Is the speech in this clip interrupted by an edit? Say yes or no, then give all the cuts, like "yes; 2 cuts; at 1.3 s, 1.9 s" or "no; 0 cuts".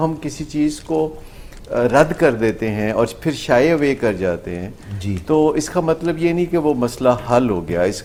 no; 0 cuts